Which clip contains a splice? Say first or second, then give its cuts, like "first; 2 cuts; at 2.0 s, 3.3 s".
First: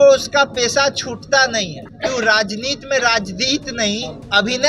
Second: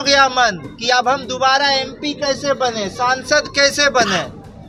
first; 1 cut; at 1.8 s